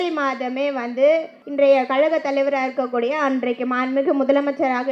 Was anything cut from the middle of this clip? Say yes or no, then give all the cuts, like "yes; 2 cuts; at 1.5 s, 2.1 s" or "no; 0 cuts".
yes; 1 cut; at 1.4 s